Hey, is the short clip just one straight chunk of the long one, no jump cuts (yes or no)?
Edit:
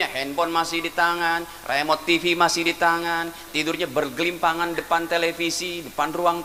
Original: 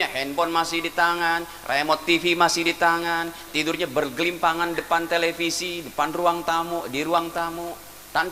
yes